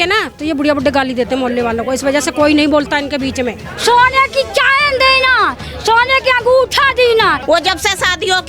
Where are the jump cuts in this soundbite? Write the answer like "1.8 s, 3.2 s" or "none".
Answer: 3.7 s, 7.4 s